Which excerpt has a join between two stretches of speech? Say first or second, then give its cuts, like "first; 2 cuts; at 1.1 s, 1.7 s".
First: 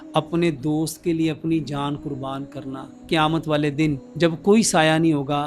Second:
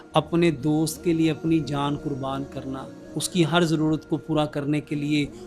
first; 2 cuts; at 2.9 s, 4.1 s